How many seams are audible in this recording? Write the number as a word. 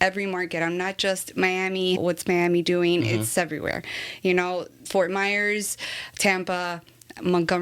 two